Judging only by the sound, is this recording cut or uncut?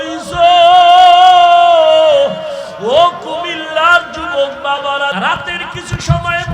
cut